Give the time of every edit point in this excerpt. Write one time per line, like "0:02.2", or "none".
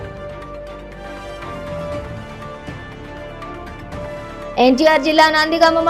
0:03.8

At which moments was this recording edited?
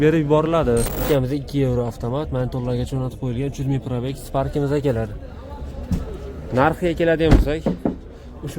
0:01.0

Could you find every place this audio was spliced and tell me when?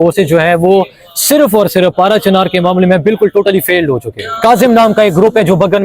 0:04.2

